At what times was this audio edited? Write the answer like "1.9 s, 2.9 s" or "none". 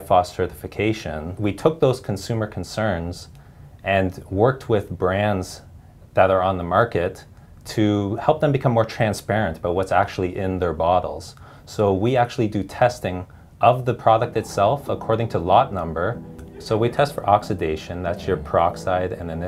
1.4 s, 16.3 s